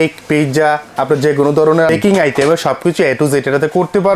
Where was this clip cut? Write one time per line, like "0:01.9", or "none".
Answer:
0:01.9

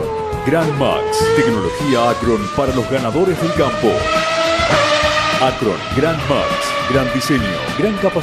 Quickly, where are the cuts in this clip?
none

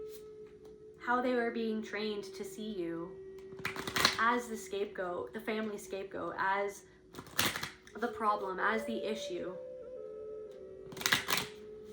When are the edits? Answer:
0:09.3
0:10.9

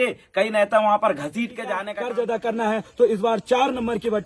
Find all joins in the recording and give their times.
0:01.9

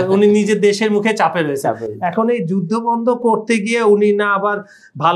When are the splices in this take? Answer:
none

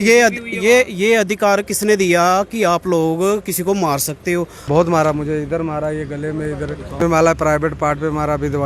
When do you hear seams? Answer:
0:04.6
0:07.0

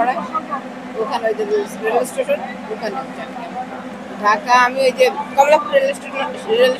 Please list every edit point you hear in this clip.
0:03.9

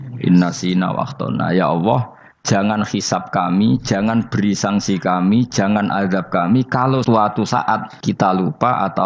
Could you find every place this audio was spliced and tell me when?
0:07.0
0:07.9

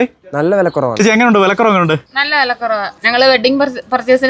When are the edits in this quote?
0:02.6

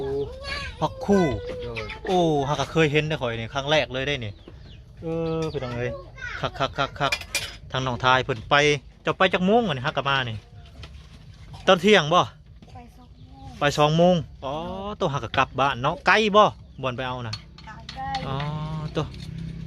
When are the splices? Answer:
none

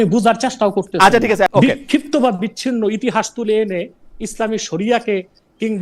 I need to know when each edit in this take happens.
0:01.5

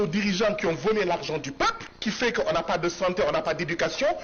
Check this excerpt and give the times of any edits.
0:01.9

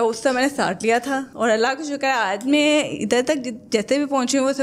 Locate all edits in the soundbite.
none

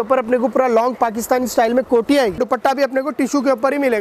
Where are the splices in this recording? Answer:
0:02.4

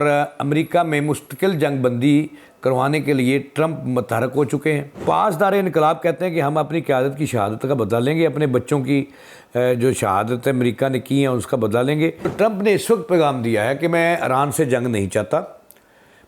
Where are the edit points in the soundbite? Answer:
0:05.0
0:12.3

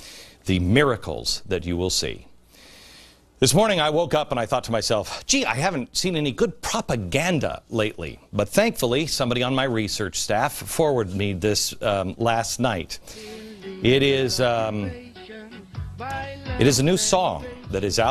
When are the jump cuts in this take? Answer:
0:17.0

